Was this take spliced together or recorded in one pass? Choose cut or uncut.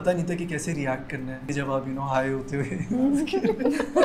cut